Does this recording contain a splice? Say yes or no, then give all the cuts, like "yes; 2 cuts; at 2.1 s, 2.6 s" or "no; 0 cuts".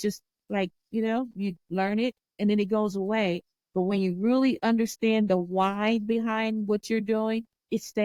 no; 0 cuts